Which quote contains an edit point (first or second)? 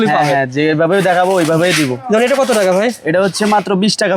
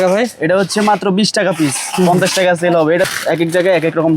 second